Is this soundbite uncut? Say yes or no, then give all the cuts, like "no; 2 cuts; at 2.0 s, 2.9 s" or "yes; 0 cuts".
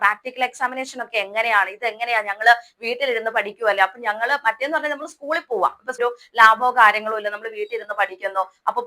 no; 1 cut; at 6.0 s